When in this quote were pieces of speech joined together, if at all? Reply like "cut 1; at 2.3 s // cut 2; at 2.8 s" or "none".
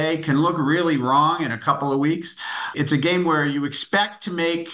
cut 1; at 2.7 s